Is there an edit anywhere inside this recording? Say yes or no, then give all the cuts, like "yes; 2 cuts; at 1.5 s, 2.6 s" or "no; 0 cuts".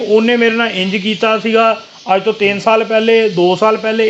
no; 0 cuts